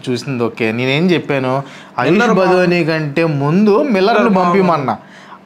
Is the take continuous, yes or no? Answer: yes